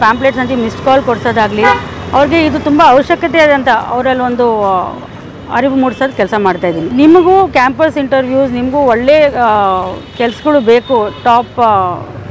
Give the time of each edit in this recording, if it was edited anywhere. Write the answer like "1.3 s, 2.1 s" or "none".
6.8 s